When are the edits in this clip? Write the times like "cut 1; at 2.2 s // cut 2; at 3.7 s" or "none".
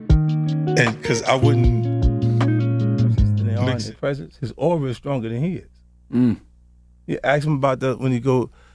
cut 1; at 3.6 s

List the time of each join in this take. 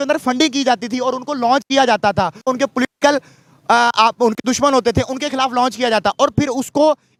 none

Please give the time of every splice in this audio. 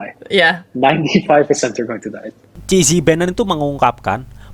cut 1; at 2.5 s

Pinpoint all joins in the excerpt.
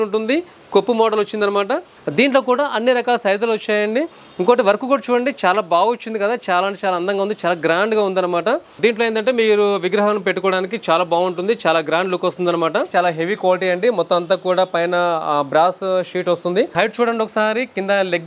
cut 1; at 1.9 s // cut 2; at 8.8 s // cut 3; at 12.9 s // cut 4; at 16.7 s

